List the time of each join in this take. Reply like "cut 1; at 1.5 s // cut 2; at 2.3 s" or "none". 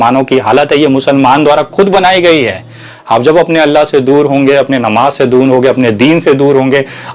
none